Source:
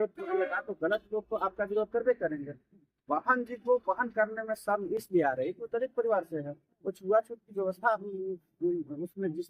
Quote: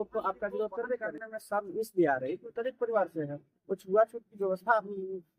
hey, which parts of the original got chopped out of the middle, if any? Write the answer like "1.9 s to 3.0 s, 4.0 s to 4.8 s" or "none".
2.5 s to 4.5 s